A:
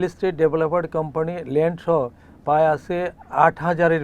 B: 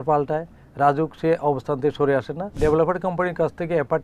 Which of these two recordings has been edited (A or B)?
B